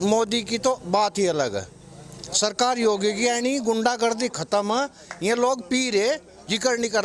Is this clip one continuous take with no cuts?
yes; 0 cuts

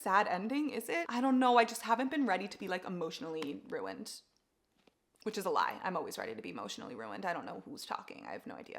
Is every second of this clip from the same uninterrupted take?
no; 1 cut; at 1.1 s

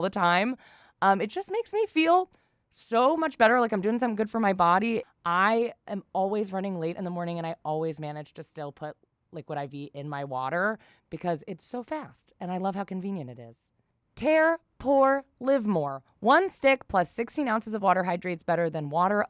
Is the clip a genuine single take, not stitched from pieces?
yes; 0 cuts

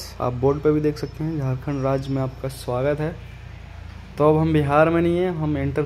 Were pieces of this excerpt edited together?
no; 0 cuts

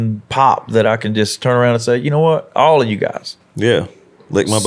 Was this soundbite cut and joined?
no; 0 cuts

